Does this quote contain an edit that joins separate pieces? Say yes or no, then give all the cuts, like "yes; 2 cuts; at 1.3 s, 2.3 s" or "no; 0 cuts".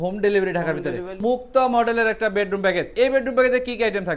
yes; 2 cuts; at 1.2 s, 2.9 s